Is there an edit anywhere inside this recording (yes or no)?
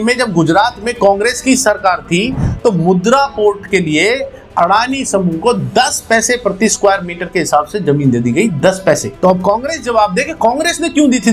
no